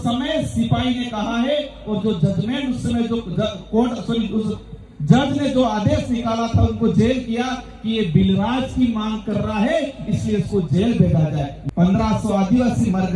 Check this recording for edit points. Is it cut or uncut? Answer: cut